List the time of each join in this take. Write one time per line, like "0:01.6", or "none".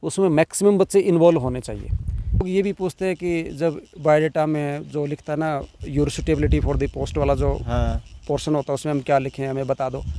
0:02.4